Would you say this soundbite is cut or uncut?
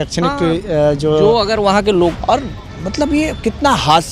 cut